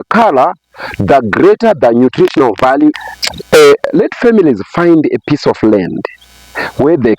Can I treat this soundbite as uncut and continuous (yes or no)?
no